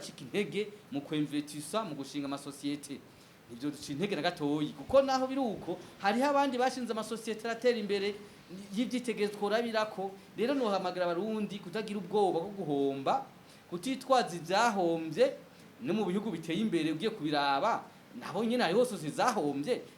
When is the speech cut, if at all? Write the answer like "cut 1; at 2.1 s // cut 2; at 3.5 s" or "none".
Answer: none